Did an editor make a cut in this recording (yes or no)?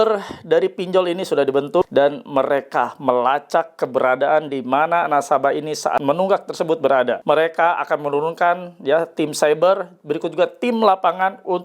yes